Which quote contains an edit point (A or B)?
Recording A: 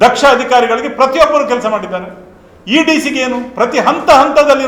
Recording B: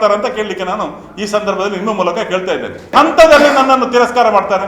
B